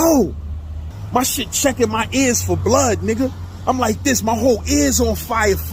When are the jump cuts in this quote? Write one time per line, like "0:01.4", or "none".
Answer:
0:00.9